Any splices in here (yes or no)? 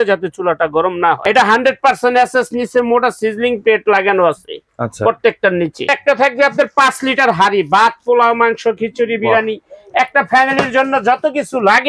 yes